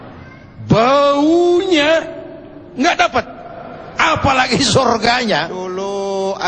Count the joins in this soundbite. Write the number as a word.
one